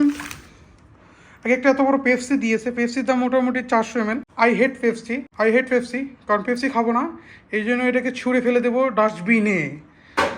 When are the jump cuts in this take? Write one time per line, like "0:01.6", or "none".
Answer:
0:04.2
0:05.3